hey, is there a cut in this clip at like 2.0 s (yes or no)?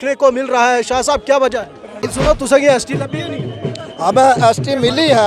yes